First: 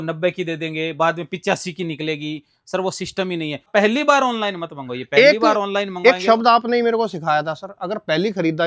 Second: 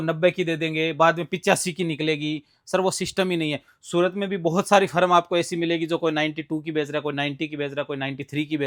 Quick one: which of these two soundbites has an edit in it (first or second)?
first